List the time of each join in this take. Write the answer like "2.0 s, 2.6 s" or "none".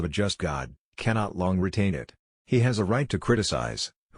2.1 s

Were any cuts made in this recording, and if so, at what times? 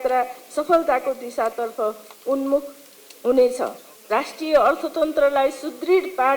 3.9 s

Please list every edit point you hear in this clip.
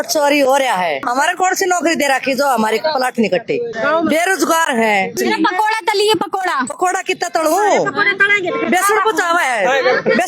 1.0 s, 3.7 s, 5.2 s, 6.7 s

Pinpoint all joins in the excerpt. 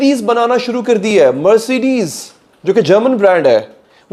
none

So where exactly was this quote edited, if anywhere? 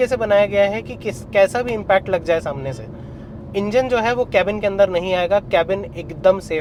none

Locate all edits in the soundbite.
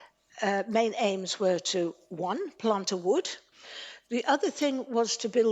3.4 s

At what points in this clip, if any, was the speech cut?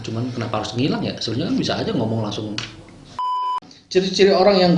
3.4 s

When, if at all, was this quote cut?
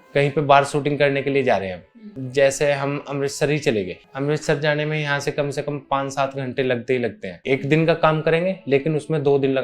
4.0 s

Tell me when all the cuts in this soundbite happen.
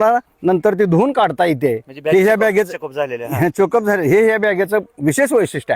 none

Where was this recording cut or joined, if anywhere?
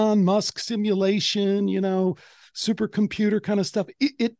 none

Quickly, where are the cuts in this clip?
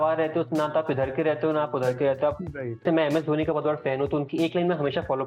2.8 s

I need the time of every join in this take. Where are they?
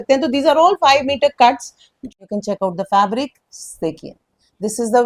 2.1 s

